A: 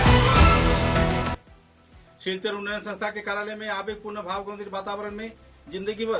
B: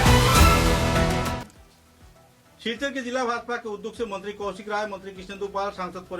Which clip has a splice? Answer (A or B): B